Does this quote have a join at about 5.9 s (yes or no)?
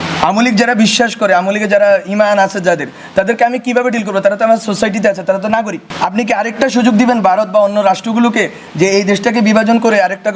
yes